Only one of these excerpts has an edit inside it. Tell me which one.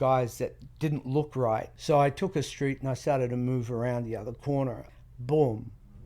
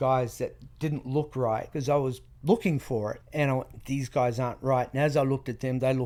first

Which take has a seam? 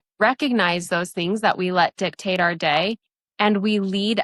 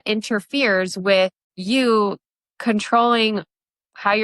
second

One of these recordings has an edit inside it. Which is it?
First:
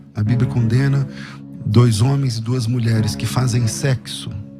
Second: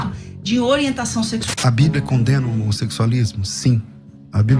second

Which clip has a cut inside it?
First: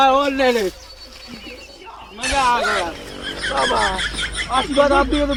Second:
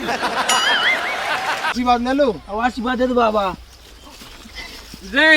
second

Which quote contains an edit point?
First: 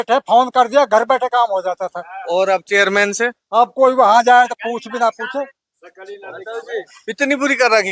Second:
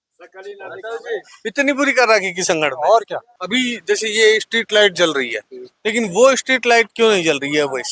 second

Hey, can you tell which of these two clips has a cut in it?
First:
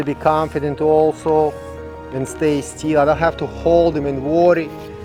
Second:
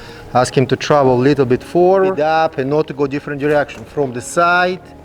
second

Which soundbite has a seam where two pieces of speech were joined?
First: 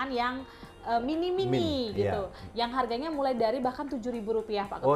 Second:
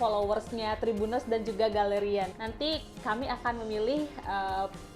second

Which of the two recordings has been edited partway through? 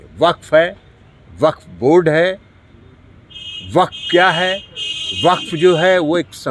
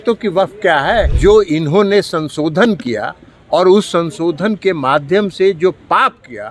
second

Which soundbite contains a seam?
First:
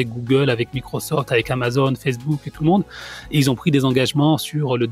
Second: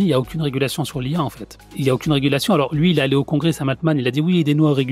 second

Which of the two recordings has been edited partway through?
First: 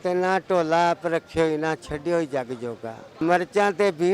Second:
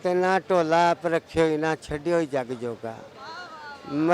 first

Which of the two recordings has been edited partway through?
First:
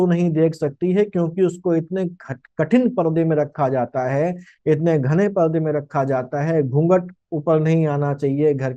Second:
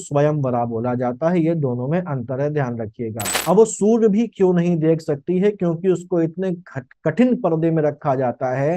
second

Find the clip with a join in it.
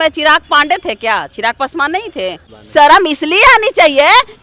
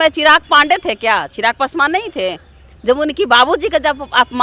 first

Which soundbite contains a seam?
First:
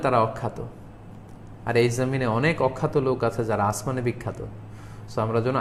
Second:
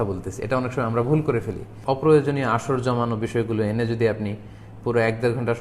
second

